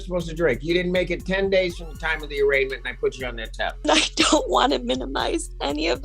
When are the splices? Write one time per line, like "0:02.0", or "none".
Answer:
0:03.9